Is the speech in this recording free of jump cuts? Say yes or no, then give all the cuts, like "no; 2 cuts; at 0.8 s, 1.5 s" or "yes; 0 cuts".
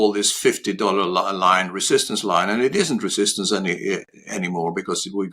yes; 0 cuts